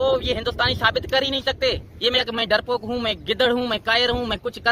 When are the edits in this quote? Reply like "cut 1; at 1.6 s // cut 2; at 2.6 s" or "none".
cut 1; at 2.2 s